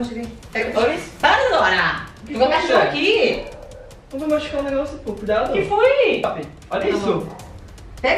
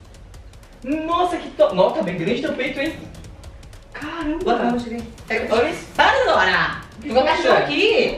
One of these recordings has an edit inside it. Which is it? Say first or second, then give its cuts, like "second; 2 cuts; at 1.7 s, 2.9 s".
first; 1 cut; at 6.2 s